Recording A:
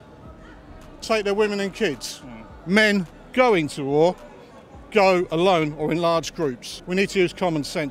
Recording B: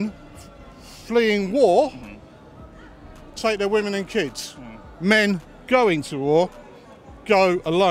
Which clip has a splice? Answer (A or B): A